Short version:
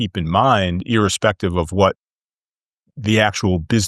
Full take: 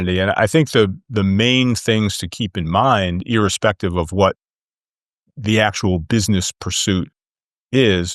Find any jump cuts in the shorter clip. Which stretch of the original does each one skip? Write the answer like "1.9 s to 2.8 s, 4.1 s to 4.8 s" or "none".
none